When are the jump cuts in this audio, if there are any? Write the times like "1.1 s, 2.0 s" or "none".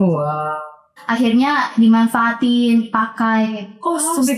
0.9 s